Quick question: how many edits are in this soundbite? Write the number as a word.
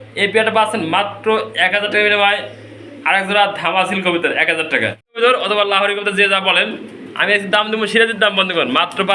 one